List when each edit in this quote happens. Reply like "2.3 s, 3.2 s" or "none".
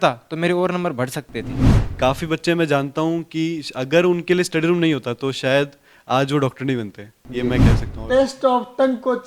1.8 s, 7.9 s